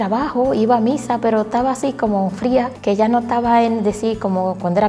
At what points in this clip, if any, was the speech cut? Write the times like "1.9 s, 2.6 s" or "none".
2.7 s